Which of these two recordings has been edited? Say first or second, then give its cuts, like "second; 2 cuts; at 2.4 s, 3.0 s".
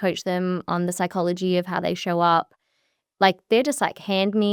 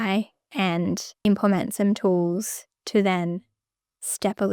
second; 1 cut; at 1.1 s